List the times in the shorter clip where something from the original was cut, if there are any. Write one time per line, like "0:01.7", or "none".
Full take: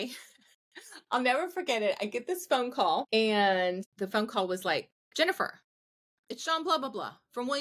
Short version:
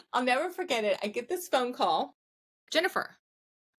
0:02.1

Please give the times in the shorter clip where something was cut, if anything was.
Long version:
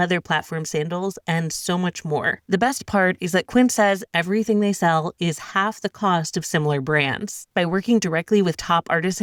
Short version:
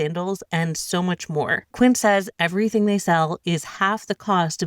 0:01.7

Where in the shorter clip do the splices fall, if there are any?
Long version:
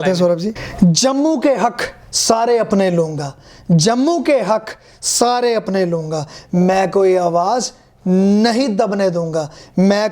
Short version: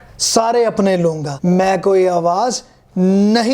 0:01.3

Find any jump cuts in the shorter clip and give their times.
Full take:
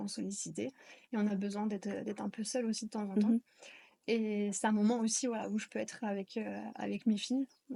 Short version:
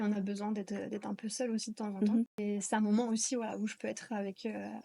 0:02.4

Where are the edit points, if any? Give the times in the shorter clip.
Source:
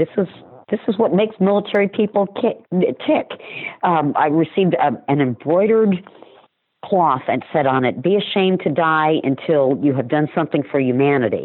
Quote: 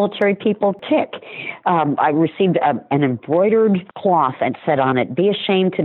0:00.8
0:03.9

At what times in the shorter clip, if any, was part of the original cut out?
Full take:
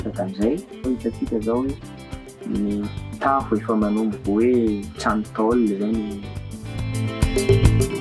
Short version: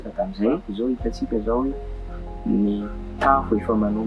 none

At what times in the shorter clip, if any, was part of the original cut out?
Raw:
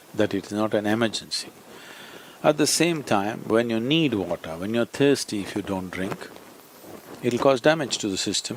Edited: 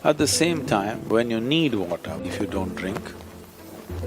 0:02.2

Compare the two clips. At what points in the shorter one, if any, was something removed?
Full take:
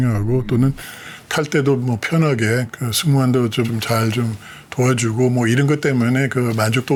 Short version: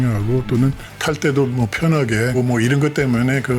0:00.9
0:02.4

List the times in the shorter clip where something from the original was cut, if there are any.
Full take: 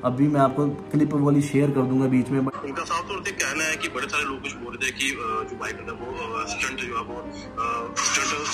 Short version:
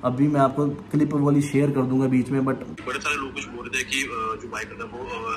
0:02.6

